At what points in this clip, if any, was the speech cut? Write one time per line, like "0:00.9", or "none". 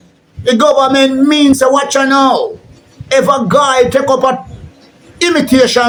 none

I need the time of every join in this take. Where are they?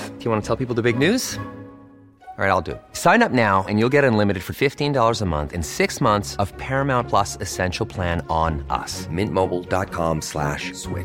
none

